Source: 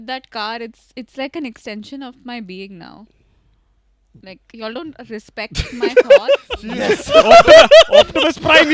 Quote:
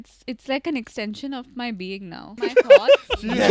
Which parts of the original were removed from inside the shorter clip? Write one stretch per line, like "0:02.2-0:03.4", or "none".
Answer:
0:03.0-0:05.8